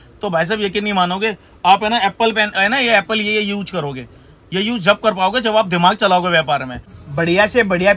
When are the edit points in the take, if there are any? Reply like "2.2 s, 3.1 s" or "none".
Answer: 7.0 s